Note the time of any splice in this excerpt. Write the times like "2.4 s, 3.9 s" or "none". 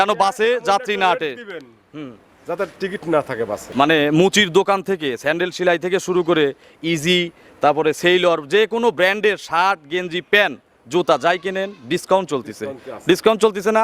3.6 s